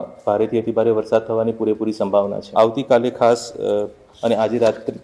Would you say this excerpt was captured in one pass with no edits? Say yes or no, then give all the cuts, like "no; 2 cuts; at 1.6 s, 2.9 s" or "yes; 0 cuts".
no; 1 cut; at 2.4 s